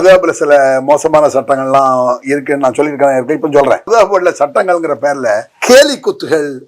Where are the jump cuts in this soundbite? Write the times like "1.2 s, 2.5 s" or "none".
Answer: 3.9 s, 5.5 s